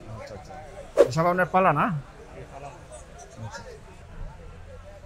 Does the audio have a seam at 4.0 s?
yes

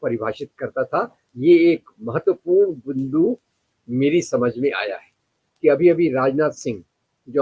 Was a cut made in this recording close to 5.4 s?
yes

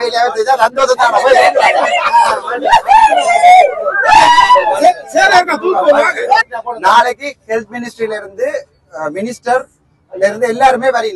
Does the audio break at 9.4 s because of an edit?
no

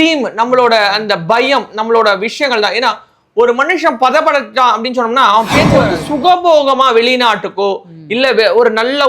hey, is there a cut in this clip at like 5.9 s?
yes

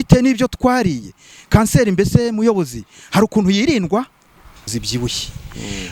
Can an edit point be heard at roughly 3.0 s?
no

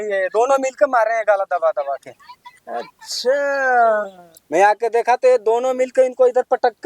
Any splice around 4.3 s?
yes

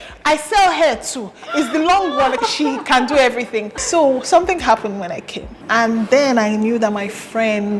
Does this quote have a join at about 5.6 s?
yes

